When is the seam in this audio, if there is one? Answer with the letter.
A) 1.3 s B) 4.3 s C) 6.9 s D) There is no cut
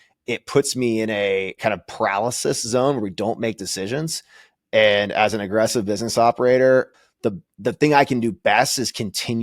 C